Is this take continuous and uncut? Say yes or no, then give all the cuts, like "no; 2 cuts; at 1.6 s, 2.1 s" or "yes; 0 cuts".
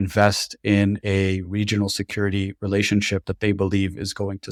yes; 0 cuts